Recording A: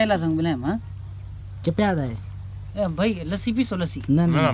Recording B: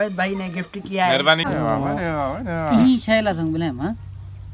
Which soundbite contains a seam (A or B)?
B